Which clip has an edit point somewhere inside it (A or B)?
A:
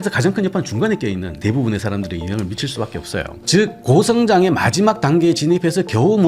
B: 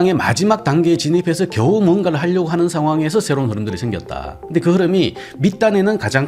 A